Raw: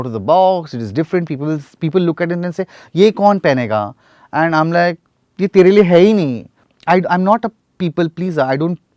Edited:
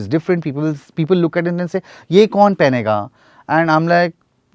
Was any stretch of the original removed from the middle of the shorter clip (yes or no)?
no